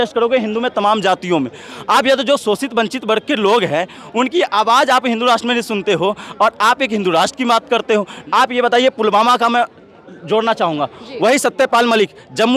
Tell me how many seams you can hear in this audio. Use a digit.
1